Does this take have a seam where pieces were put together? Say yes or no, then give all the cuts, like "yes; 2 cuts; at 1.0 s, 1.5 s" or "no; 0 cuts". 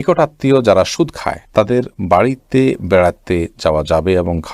no; 0 cuts